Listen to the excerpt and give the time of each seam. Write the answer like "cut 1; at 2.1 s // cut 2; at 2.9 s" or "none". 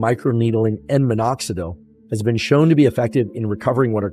none